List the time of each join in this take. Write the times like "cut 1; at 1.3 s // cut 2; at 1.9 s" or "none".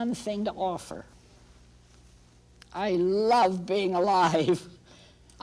none

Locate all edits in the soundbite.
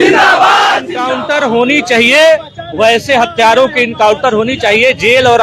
cut 1; at 1.0 s

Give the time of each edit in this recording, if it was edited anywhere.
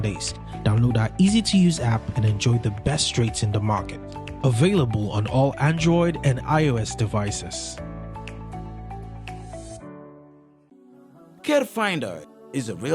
cut 1; at 10.6 s

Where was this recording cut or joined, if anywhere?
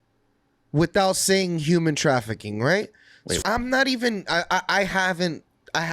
cut 1; at 3.4 s

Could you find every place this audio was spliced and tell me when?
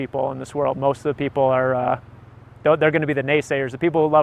none

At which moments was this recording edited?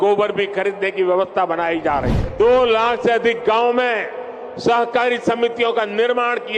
cut 1; at 2.2 s

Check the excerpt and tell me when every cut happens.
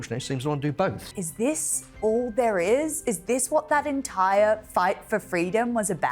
cut 1; at 1.1 s

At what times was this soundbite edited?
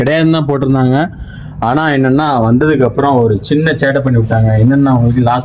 none

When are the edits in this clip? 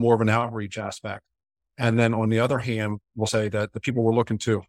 cut 1; at 3.3 s

